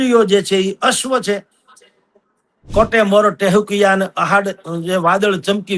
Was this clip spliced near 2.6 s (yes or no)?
yes